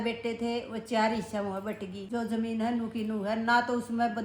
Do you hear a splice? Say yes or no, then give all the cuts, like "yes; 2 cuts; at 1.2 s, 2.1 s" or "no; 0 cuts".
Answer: yes; 1 cut; at 2.0 s